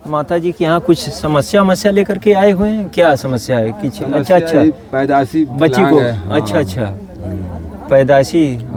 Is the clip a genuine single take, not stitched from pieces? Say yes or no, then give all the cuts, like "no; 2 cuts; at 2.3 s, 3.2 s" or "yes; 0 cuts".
yes; 0 cuts